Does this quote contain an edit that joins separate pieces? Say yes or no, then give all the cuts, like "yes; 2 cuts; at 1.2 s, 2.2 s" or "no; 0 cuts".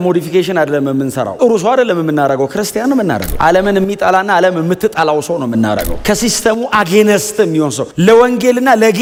no; 0 cuts